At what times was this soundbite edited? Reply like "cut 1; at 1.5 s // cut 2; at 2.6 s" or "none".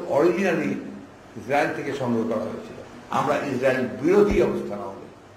cut 1; at 2.9 s